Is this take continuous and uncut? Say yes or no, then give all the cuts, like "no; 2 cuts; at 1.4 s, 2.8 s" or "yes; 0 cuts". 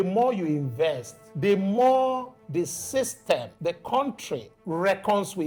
yes; 0 cuts